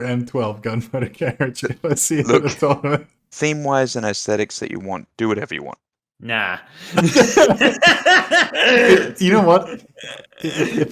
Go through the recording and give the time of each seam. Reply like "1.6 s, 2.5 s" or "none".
3.2 s, 5.1 s

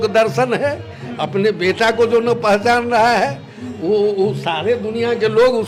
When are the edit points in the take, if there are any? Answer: none

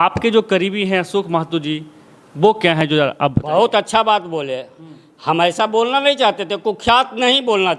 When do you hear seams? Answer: none

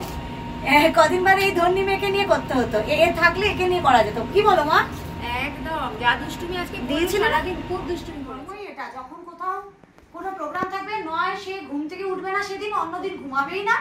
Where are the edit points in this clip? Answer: 8.3 s

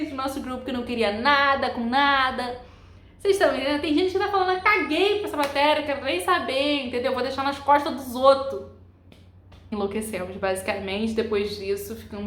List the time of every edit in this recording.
9.7 s

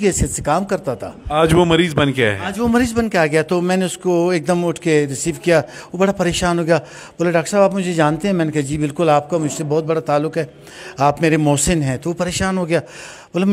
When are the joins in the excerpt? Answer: none

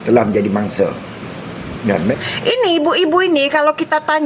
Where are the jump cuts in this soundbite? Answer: 2.1 s

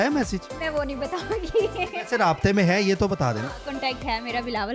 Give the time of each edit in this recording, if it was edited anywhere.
none

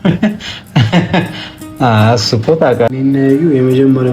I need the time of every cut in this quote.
2.9 s

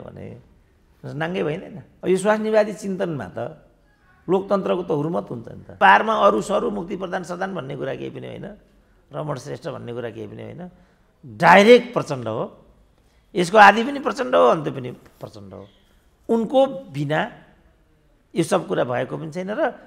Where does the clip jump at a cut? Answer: 1.8 s, 5.8 s

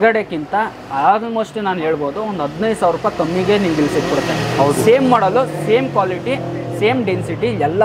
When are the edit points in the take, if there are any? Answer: none

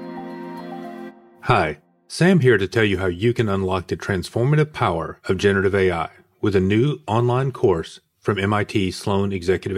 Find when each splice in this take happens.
1.2 s

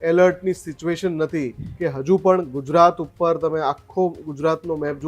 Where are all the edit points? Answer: 1.6 s

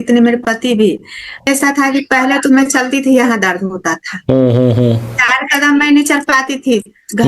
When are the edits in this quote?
1.5 s

